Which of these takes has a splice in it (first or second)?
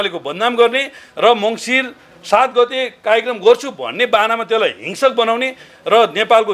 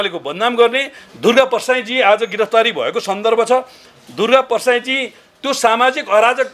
second